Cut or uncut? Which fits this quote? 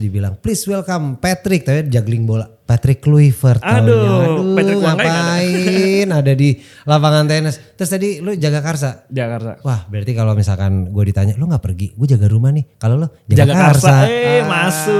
uncut